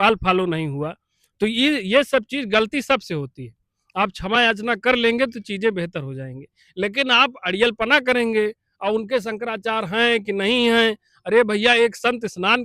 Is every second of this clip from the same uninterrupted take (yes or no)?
yes